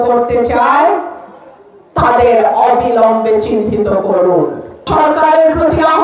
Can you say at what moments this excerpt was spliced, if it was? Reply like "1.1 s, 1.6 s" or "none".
4.9 s